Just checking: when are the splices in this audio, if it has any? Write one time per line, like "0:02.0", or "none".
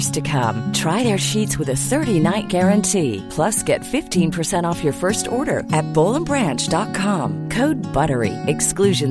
none